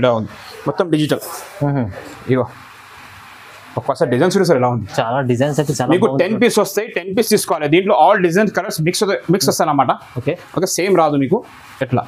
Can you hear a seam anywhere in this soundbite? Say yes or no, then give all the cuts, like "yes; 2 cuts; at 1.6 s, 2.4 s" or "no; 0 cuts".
no; 0 cuts